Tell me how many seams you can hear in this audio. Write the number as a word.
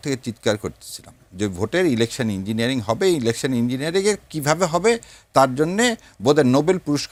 zero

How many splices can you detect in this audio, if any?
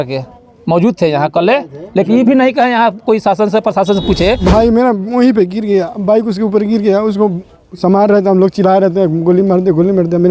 one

